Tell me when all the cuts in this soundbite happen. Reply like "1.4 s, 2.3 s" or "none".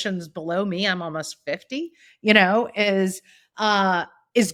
none